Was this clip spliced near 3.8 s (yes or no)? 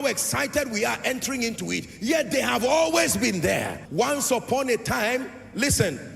yes